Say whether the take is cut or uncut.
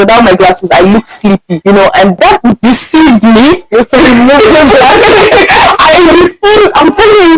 cut